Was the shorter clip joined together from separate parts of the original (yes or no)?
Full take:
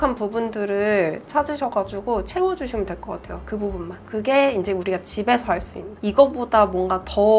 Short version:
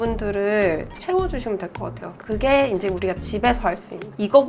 yes